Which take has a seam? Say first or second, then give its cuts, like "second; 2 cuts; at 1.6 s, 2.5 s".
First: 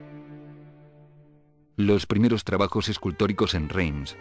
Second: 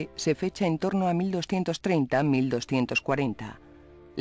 first; 1 cut; at 3.0 s